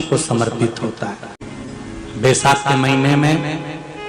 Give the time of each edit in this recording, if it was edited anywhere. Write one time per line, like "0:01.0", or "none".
none